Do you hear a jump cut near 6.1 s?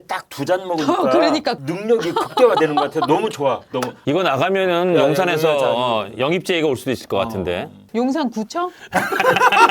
no; 2 cuts; at 3.9 s, 7.8 s

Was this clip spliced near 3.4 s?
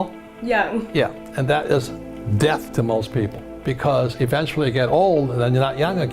yes; 1 cut; at 3.4 s

